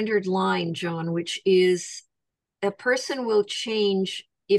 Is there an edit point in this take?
no; 0 cuts

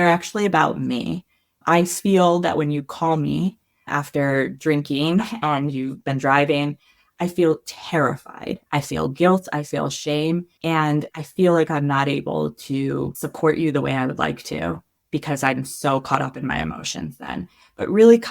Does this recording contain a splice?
yes; 3 cuts; at 8.6 s, 10.5 s, 13.2 s

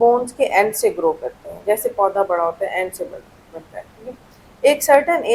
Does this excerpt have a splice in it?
no; 0 cuts

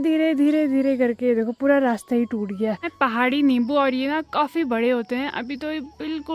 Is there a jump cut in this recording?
yes; 1 cut; at 2.9 s

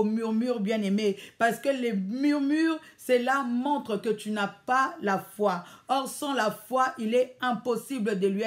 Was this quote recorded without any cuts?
yes; 0 cuts

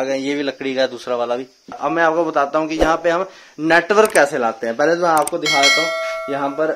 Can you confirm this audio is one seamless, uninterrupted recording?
no; 1 cut; at 1.8 s

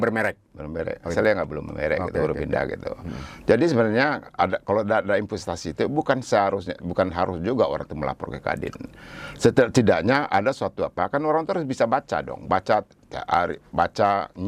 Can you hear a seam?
no; 0 cuts

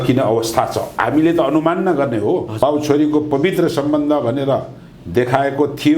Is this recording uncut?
no; 1 cut; at 2.5 s

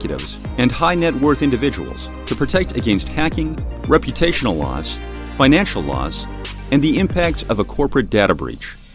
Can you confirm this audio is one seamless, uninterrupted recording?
yes; 0 cuts

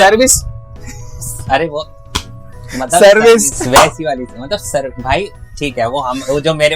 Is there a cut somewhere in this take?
no; 0 cuts

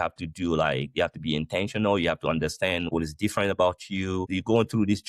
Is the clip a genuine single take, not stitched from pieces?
no; 2 cuts; at 2.9 s, 4.3 s

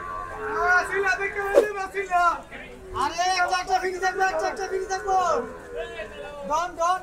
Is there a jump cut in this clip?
no; 0 cuts

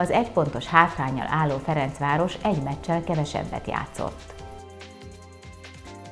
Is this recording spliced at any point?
yes; 1 cut; at 4.3 s

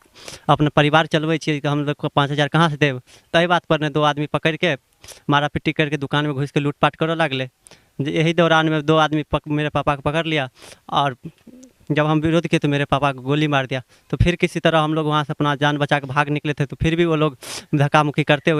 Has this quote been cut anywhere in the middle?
no; 0 cuts

